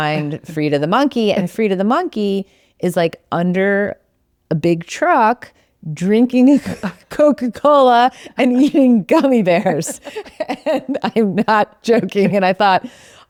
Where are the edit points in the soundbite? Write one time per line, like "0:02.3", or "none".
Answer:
none